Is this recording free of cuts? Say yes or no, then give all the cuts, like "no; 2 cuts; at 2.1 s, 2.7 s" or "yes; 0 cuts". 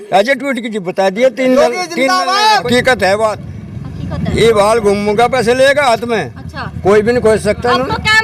no; 1 cut; at 2.6 s